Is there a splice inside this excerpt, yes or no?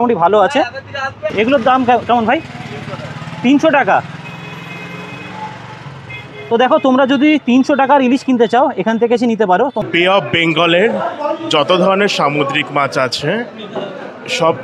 yes